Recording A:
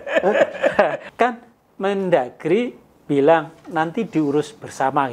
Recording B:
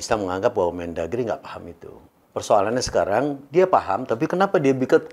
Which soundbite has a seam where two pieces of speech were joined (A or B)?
A